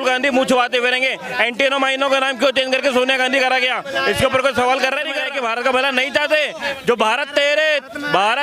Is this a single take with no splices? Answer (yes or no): no